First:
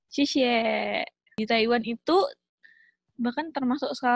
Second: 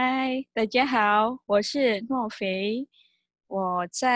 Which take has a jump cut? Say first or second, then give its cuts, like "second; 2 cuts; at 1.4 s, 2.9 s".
first; 1 cut; at 1.2 s